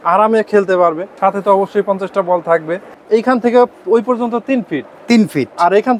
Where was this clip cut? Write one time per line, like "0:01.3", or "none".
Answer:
0:01.1
0:02.9